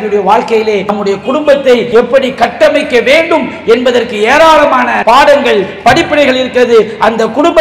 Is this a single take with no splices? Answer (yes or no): no